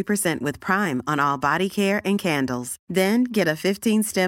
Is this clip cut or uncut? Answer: uncut